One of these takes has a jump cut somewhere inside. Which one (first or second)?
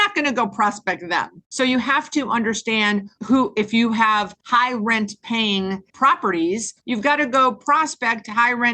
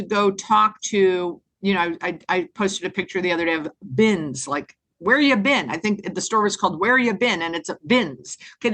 first